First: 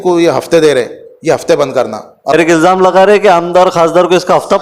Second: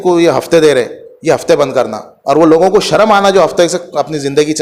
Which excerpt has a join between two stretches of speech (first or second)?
first